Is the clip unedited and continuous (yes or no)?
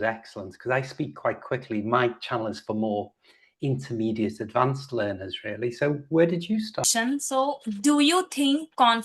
no